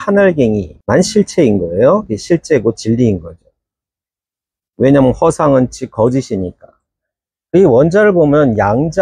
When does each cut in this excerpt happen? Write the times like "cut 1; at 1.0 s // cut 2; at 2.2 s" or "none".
none